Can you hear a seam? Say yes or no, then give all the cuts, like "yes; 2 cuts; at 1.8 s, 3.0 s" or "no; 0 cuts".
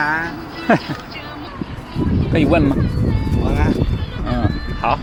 no; 0 cuts